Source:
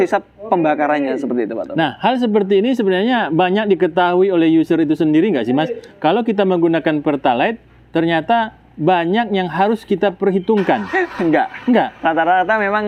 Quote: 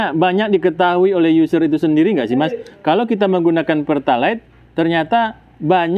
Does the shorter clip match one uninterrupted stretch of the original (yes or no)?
yes